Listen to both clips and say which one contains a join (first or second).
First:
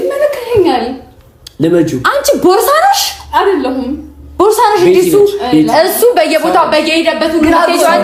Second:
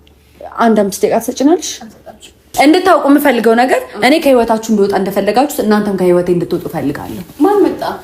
second